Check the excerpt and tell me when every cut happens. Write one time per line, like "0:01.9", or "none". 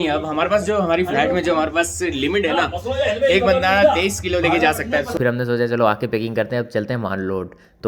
0:05.1